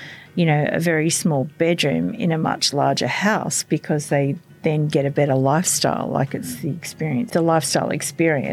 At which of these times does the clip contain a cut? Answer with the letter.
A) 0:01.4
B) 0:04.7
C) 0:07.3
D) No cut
C